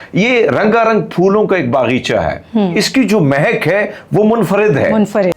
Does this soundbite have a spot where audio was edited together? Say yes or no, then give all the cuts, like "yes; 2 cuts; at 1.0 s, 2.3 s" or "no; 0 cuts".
no; 0 cuts